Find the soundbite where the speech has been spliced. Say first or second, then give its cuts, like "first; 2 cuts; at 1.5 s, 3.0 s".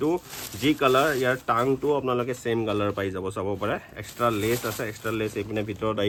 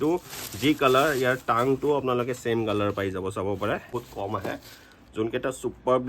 second; 1 cut; at 3.9 s